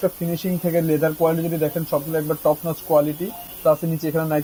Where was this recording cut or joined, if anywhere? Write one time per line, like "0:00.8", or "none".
none